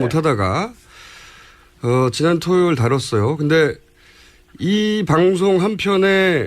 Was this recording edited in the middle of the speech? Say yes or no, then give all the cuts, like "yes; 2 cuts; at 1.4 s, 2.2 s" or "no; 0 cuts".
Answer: yes; 1 cut; at 4.9 s